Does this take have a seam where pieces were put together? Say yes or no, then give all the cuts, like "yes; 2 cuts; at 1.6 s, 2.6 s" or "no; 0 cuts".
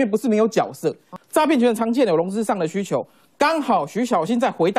yes; 1 cut; at 1.2 s